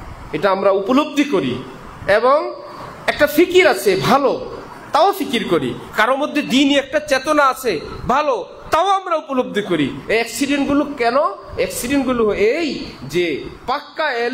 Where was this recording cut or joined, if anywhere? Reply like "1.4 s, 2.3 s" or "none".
none